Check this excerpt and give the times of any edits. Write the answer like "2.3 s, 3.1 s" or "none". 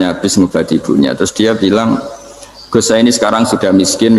none